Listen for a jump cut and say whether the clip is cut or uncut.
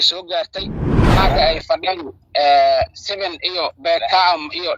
cut